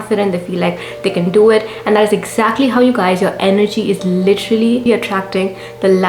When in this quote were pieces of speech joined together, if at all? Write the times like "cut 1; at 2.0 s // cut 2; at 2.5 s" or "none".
cut 1; at 5.0 s